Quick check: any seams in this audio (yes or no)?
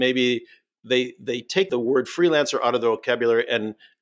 yes